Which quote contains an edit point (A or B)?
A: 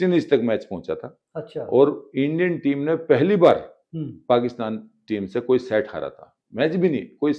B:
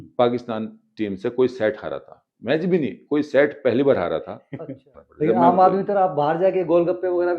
B